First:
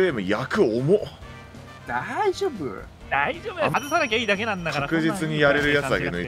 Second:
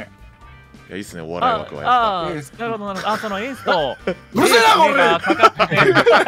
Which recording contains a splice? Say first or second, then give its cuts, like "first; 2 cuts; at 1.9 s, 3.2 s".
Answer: first; 1 cut; at 3.7 s